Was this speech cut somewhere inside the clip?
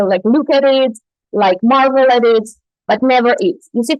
no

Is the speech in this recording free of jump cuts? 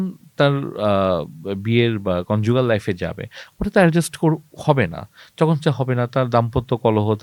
yes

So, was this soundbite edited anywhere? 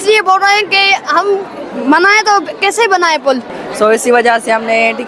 yes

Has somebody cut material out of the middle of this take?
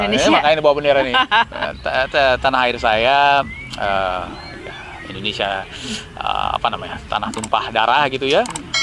no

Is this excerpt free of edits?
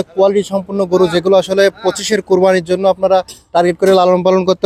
yes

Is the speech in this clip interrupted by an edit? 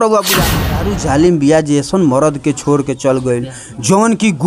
yes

